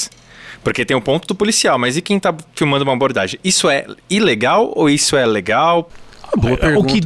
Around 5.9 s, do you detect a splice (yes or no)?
yes